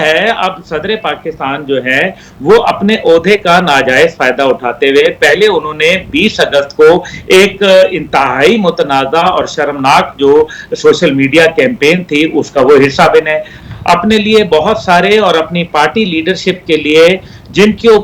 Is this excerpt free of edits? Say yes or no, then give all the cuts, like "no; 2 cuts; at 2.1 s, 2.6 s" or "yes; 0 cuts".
no; 1 cut; at 13.5 s